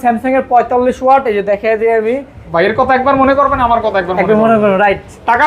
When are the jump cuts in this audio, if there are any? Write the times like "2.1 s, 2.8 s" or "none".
2.3 s